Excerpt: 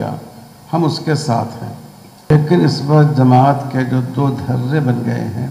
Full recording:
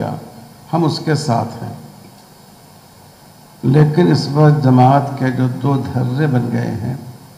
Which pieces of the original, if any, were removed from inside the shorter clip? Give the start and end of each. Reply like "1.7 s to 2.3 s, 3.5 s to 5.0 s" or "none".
2.3 s to 3.8 s

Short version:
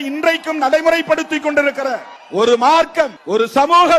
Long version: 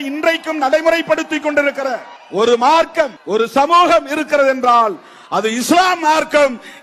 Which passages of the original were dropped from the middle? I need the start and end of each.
none

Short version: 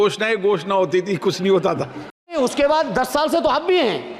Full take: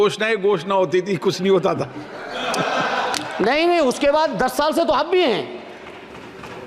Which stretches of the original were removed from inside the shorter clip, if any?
2.4 s to 3.8 s

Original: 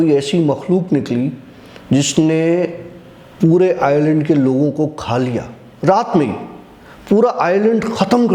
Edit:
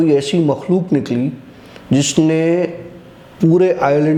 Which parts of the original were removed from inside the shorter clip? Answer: none

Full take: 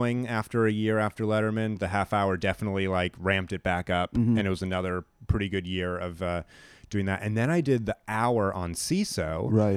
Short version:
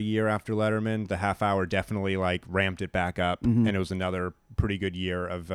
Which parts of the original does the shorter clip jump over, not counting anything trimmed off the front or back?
none

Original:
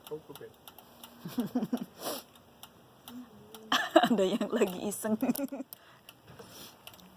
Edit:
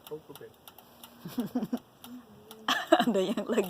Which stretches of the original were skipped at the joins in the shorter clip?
1.9 s to 2.9 s

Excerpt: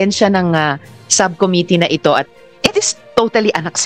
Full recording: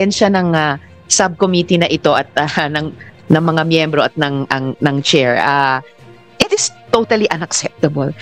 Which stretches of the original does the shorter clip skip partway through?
2.3 s to 6.0 s

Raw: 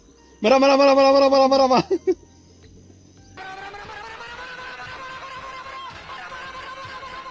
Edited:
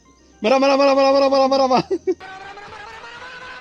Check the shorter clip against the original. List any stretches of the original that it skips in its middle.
2.2 s to 3.4 s

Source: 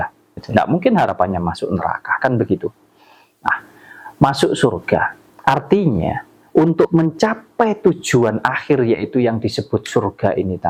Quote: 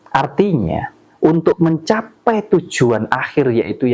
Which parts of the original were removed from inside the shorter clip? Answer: none

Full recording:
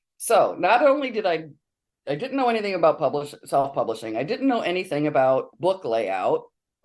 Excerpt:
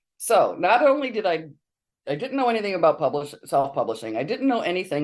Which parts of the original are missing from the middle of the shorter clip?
none

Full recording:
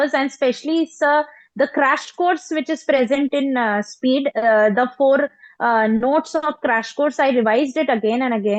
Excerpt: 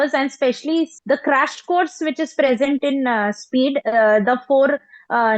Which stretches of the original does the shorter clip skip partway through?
0.9 s to 1.4 s

